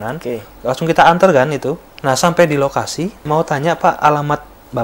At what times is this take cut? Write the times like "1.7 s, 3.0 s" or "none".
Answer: 1.9 s, 3.2 s